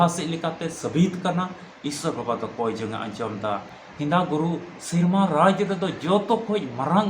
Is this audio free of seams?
no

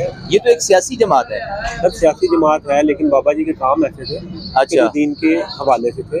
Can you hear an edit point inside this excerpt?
no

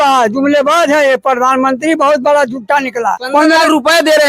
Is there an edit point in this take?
yes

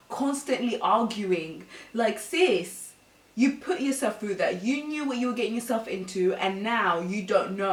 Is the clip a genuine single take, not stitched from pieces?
yes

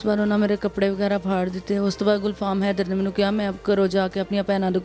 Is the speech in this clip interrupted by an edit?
no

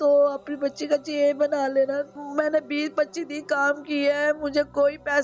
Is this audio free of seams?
no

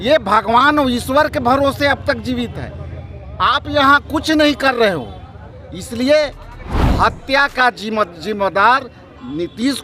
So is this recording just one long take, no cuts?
no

